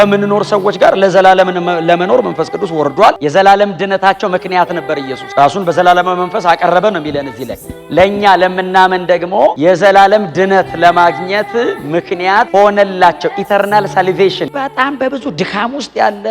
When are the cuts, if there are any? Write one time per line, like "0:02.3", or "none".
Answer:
0:03.2
0:14.5